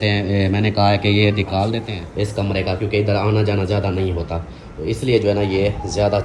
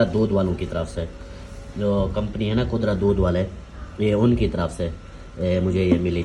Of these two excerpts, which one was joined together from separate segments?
first; 1 cut; at 1.9 s

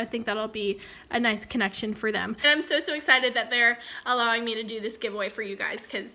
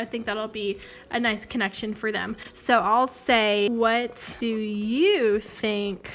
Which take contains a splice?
first; 1 cut; at 2.4 s

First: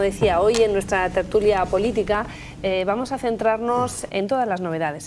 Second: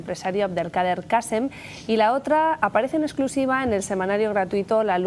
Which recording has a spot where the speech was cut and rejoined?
second; 1 cut; at 2.7 s

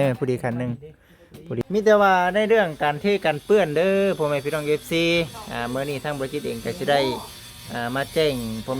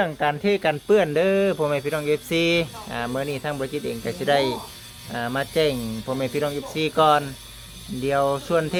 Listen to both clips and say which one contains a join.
first; 1 cut; at 1.6 s

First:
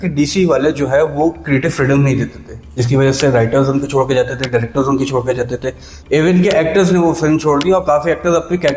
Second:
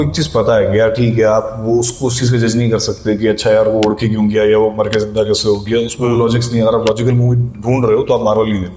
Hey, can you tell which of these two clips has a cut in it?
first; 1 cut; at 6.0 s

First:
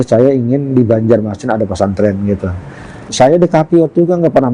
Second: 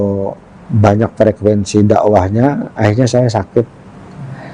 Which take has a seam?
first; 1 cut; at 3.0 s

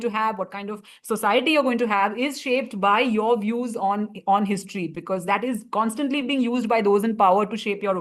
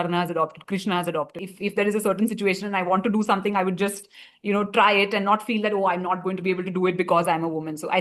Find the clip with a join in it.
second; 1 cut; at 1.4 s

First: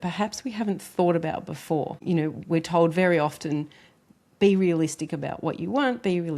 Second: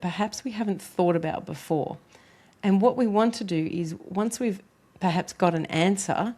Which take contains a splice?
first; 1 cut; at 2.0 s

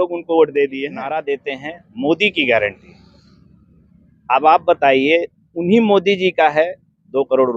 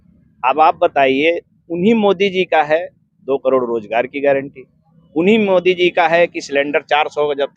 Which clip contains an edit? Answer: first; 1 cut; at 1.3 s

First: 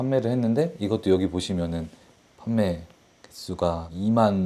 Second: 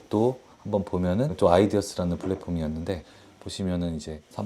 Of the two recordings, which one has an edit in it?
second; 2 cuts; at 1.3 s, 3.0 s

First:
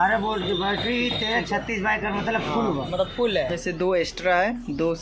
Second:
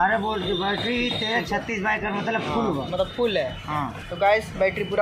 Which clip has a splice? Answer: first; 1 cut; at 3.5 s

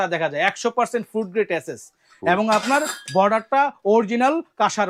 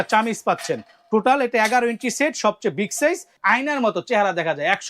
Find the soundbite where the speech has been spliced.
second; 1 cut; at 3.3 s

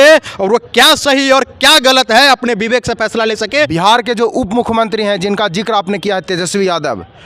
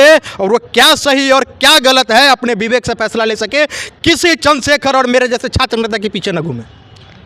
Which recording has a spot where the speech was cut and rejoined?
first; 1 cut; at 3.7 s

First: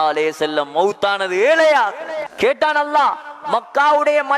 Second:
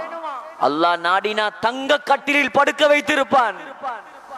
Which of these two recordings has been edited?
first; 1 cut; at 2.3 s

